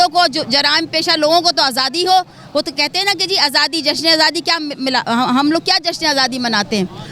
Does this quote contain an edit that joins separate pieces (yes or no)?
no